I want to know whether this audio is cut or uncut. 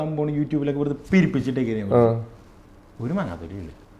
uncut